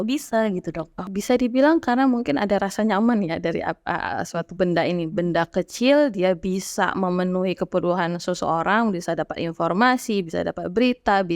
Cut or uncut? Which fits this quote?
cut